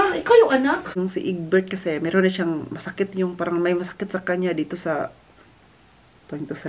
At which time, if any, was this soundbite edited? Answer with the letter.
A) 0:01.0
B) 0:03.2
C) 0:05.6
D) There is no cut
A